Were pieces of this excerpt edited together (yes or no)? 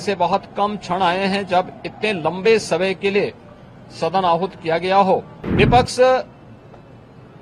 yes